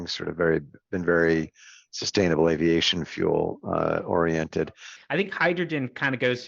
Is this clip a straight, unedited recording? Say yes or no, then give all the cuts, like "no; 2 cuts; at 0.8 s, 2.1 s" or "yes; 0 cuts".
no; 1 cut; at 4.9 s